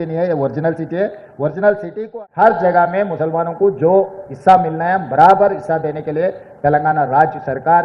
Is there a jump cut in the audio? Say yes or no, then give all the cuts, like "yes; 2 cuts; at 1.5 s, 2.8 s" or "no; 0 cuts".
yes; 1 cut; at 2.0 s